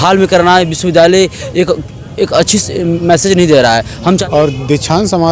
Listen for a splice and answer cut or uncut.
cut